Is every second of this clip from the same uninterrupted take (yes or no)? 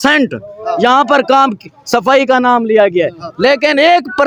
yes